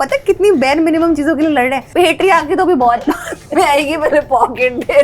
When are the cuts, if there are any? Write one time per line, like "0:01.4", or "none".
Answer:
0:01.8